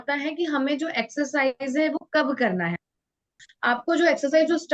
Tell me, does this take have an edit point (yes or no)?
yes